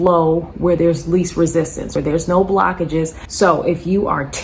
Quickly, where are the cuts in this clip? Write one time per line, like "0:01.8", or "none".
0:01.9
0:03.2